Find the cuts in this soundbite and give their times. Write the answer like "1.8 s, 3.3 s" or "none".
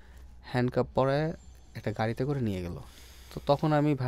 none